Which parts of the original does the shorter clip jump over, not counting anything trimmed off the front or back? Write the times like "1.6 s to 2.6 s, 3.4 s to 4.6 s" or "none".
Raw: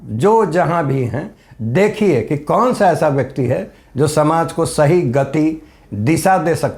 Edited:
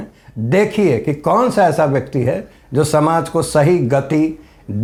none